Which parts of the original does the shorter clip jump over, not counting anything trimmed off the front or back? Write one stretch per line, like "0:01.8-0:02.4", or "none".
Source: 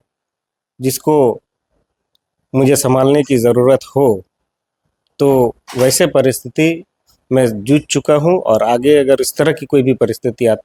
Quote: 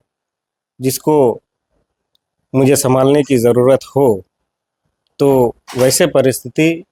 none